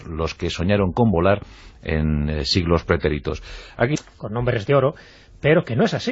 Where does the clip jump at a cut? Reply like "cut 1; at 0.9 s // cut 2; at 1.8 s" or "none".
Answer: none